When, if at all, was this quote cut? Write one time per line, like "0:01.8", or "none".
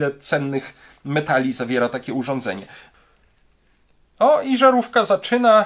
0:02.8